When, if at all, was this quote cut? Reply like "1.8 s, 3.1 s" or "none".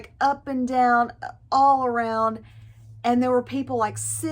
none